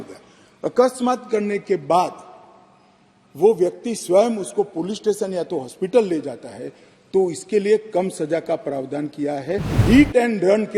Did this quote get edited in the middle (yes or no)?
yes